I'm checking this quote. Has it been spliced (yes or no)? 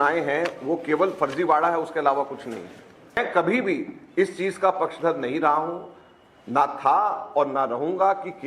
yes